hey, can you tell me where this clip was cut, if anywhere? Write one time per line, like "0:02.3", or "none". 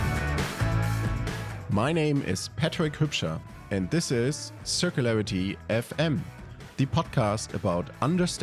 0:01.0